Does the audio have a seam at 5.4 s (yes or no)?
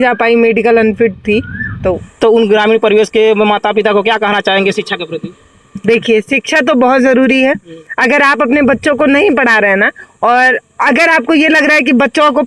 no